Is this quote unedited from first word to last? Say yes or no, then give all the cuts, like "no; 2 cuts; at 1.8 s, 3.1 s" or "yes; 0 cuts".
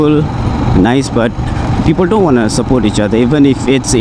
yes; 0 cuts